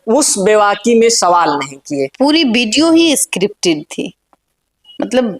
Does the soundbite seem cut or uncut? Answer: cut